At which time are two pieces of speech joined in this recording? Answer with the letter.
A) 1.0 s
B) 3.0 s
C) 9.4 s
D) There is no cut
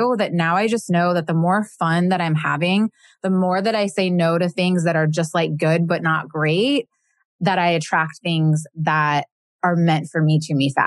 C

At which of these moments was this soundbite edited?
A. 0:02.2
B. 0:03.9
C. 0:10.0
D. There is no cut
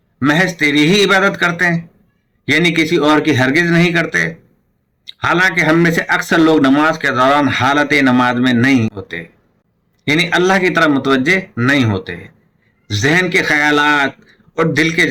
D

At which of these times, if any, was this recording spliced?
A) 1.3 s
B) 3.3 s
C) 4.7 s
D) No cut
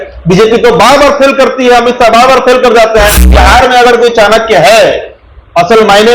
B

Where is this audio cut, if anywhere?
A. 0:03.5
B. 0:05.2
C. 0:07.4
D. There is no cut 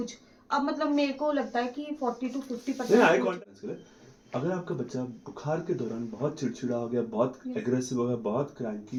D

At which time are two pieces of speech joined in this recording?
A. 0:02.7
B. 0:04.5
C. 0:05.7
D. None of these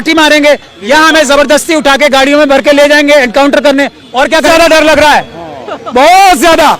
B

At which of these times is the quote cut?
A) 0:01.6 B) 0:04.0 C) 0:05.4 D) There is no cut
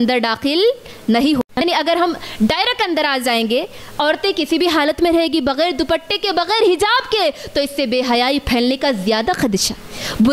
A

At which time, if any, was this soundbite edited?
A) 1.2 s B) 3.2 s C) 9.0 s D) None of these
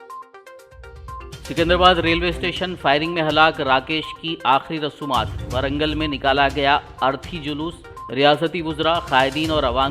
A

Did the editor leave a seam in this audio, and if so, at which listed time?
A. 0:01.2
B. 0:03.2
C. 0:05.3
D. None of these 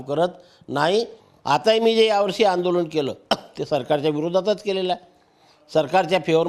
A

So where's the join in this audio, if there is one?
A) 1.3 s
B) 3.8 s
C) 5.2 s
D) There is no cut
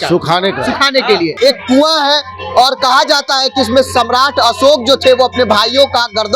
A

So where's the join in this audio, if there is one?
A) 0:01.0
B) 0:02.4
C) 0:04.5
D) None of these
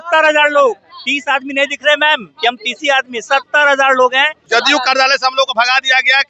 C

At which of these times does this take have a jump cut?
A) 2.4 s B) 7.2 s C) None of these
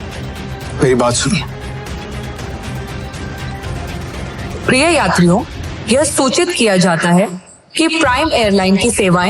A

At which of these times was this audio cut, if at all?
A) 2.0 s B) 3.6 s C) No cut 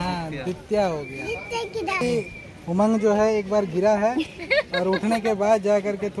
A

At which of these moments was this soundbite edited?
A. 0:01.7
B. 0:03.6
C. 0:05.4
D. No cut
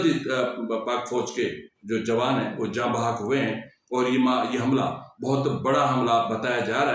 D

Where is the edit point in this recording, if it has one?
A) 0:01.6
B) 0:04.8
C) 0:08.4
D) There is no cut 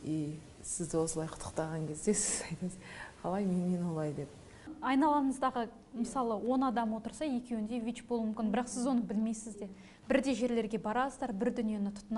B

